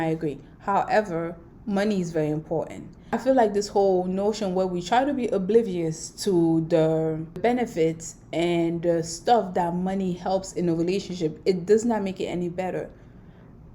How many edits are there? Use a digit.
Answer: 1